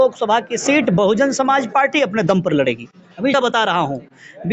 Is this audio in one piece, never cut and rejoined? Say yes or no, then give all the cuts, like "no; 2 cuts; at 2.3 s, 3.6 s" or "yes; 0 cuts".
no; 1 cut; at 3.3 s